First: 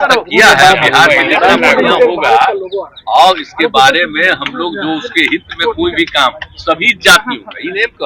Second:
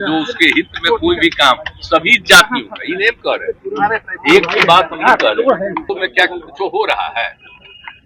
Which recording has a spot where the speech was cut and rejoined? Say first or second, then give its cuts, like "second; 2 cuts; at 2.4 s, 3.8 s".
second; 1 cut; at 5.9 s